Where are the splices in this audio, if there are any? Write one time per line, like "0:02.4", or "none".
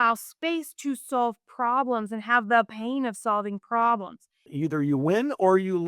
0:04.5

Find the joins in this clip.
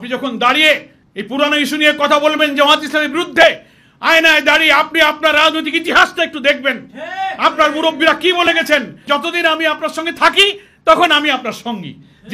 0:09.0

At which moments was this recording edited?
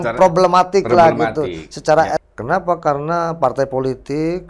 0:02.2

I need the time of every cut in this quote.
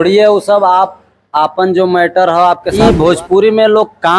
0:02.8

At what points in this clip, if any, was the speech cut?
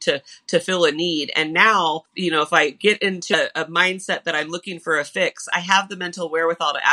0:02.1
0:03.3

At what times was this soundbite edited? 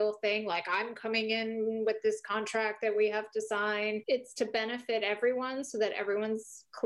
none

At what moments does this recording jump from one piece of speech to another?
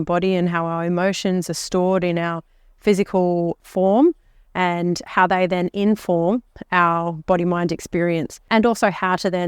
0:03.6
0:08.5

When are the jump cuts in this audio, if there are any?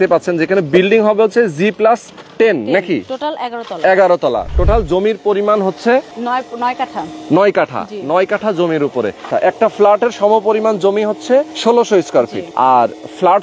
0:02.2
0:06.2
0:09.3
0:11.5
0:12.4

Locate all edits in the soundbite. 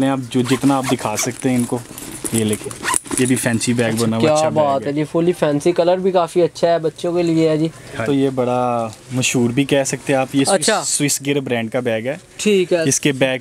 0:08.0

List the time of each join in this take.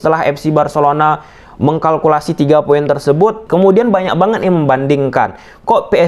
0:03.4

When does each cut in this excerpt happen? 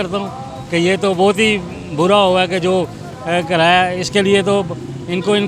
none

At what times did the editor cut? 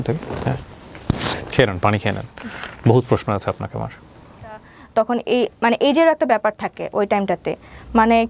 0:04.8

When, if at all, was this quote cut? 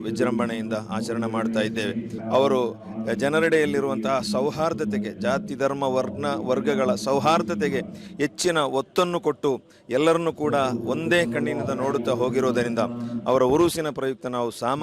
0:02.1

